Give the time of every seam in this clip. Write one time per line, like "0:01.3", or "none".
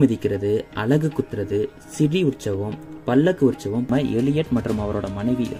0:03.9